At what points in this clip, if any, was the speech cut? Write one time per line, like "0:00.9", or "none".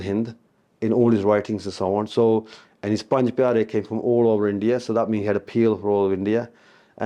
none